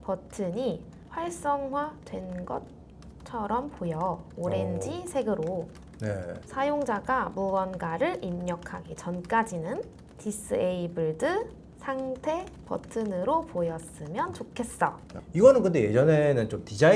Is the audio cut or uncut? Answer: uncut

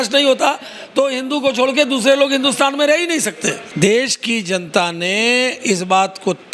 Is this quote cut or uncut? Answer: cut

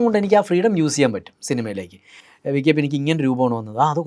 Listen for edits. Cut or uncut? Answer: uncut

